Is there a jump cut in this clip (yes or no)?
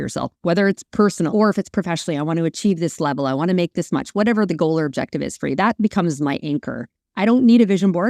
yes